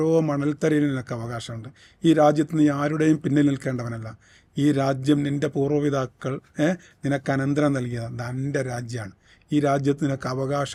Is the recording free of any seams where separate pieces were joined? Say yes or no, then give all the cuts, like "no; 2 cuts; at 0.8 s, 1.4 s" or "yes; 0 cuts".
yes; 0 cuts